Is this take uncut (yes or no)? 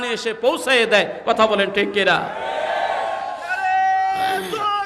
yes